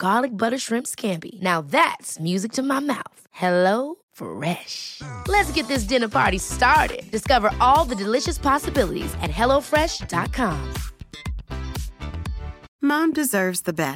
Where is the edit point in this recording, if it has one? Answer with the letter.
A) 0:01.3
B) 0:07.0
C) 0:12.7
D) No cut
D